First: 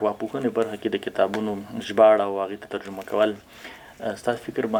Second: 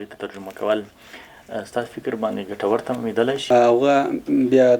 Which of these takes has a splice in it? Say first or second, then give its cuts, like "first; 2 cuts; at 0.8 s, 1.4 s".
second; 1 cut; at 3.4 s